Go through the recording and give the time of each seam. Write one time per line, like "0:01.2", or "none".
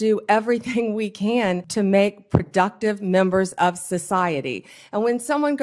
0:01.6